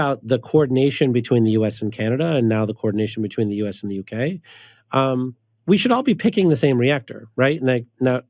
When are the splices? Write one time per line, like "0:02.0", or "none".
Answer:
none